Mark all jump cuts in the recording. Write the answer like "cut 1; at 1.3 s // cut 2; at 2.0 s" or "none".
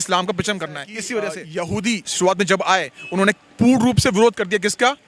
cut 1; at 1.4 s